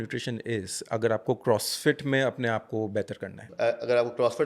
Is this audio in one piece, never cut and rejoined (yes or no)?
no